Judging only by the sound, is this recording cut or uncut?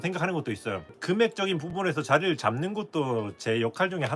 cut